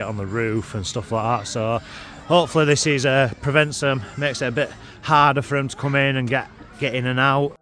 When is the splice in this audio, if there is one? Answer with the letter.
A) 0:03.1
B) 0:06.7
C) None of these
C